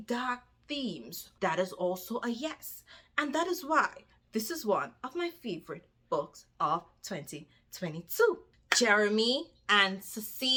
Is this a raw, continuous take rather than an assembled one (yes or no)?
yes